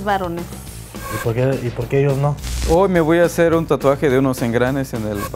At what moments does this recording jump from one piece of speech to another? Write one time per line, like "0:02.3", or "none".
0:02.5